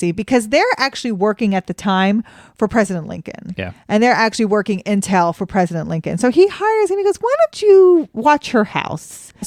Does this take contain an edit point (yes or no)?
no